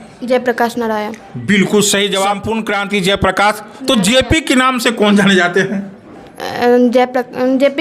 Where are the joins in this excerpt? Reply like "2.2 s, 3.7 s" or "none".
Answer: 2.5 s